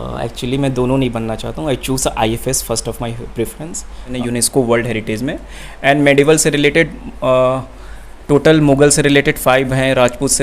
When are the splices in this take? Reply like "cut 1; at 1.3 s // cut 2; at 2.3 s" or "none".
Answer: cut 1; at 4.1 s